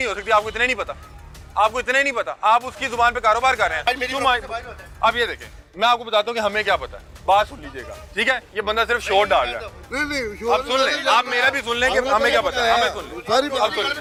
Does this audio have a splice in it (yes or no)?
no